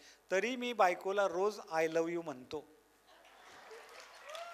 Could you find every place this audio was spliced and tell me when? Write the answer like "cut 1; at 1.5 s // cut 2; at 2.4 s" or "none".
none